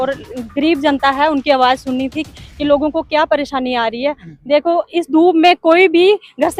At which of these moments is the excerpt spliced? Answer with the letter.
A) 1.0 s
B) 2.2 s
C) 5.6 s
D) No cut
D